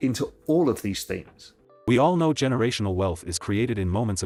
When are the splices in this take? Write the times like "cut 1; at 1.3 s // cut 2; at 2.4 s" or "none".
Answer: none